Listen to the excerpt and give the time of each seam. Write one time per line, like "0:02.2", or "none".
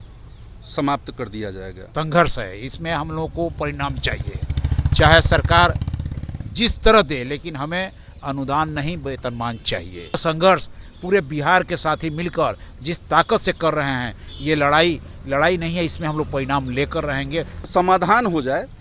0:01.8
0:10.2
0:17.7